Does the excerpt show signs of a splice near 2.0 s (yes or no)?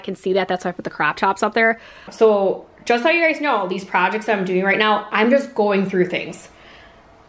yes